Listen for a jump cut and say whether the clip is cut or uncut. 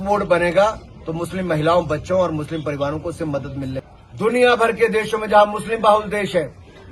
cut